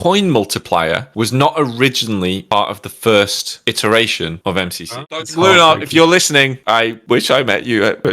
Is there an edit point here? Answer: yes; 1 cut; at 4.9 s

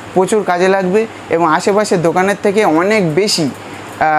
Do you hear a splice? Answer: no; 0 cuts

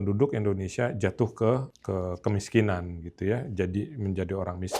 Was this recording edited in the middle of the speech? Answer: no; 0 cuts

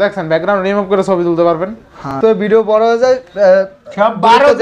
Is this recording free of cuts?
no; 1 cut; at 2.1 s

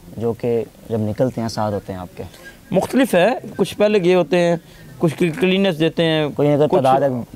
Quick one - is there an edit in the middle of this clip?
no; 0 cuts

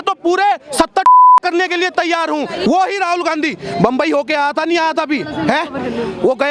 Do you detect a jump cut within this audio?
yes; 1 cut; at 2.6 s

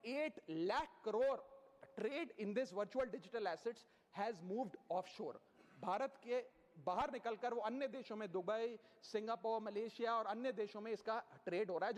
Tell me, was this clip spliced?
no; 0 cuts

